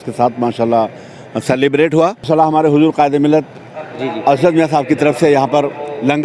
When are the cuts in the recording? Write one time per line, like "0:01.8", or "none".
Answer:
0:02.3